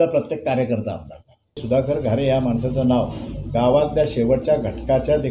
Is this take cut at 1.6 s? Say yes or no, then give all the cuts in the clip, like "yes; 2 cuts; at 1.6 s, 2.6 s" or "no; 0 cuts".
yes; 1 cut; at 1.6 s